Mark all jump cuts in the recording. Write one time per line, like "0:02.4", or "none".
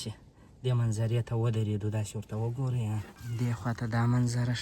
0:03.2